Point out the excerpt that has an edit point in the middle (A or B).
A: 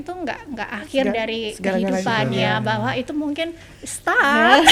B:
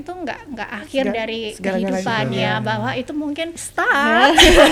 B